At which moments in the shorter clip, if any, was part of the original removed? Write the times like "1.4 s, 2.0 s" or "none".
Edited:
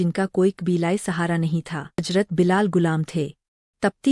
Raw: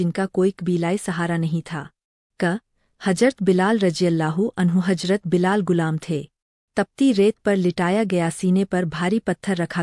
2.1 s